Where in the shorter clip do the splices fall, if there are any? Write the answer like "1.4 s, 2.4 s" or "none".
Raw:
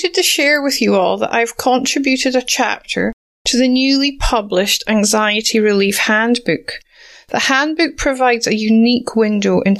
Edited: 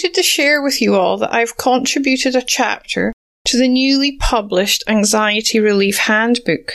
none